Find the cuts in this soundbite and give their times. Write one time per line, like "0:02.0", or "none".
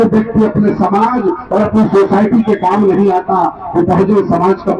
none